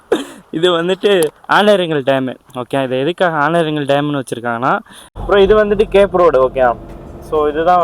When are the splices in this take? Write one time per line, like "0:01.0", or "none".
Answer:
0:05.0